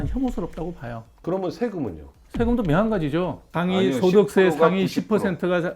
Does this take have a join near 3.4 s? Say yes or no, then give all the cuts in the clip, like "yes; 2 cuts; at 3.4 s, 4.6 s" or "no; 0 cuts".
yes; 1 cut; at 3.4 s